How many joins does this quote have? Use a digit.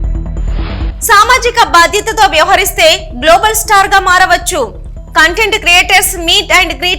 1